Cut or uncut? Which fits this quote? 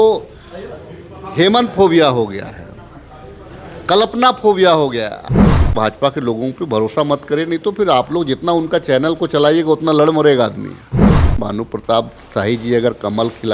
cut